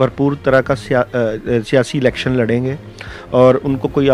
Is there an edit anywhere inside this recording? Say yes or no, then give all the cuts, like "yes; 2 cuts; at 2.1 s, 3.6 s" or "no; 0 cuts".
no; 0 cuts